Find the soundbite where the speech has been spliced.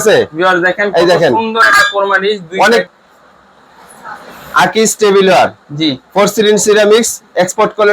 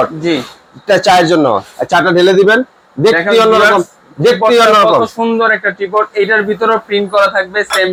first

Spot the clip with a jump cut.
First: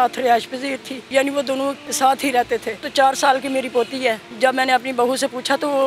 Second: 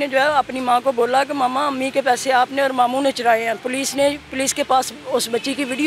first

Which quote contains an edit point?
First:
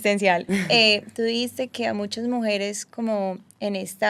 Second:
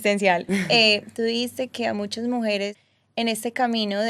second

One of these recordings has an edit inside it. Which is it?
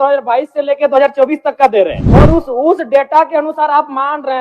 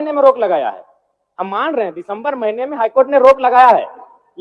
first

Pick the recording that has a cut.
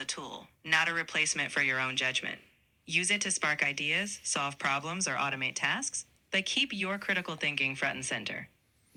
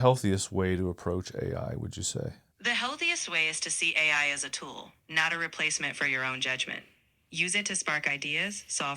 second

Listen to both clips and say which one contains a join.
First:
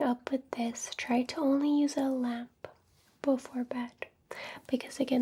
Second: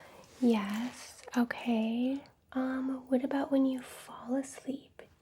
second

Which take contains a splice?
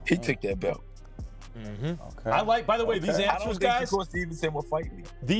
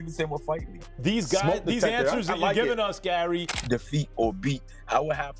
second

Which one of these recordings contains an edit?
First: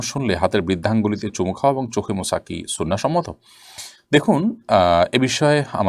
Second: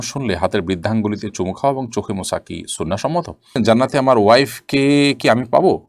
second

